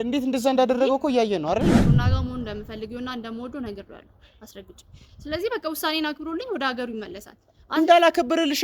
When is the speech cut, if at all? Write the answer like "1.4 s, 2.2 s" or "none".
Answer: 1.9 s